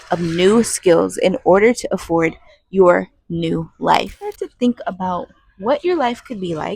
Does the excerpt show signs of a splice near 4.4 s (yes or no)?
yes